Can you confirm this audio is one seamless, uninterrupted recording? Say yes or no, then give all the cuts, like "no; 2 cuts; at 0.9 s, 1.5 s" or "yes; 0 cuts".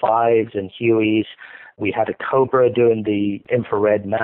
no; 2 cuts; at 1.8 s, 3.4 s